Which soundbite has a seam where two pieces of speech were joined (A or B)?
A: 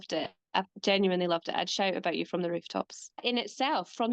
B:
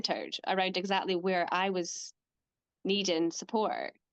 A